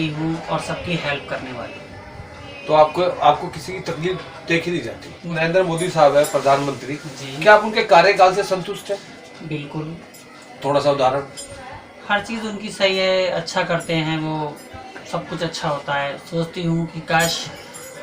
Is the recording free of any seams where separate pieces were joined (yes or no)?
no